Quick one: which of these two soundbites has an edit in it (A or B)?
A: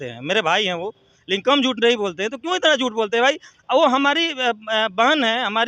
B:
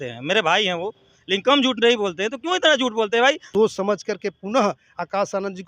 B